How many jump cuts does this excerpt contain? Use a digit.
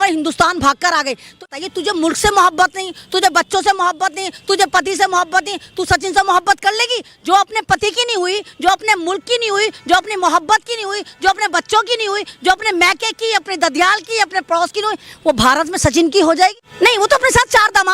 2